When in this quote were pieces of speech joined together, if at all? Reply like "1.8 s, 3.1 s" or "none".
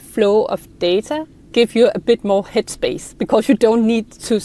1.3 s